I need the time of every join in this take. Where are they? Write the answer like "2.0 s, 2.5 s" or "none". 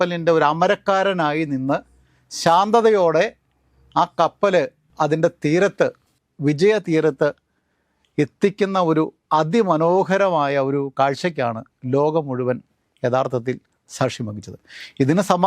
none